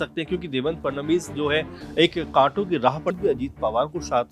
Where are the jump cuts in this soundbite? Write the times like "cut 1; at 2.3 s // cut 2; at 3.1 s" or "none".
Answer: cut 1; at 3.2 s